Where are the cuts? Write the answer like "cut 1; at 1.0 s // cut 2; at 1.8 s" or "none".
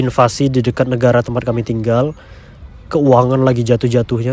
none